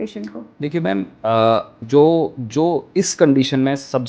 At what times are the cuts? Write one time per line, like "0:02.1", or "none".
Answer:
0:01.8